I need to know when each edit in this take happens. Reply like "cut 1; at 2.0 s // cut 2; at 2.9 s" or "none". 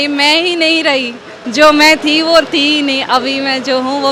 none